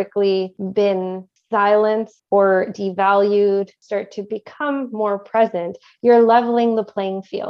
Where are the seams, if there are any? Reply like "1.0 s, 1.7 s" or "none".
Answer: 0.9 s, 2.1 s, 3.8 s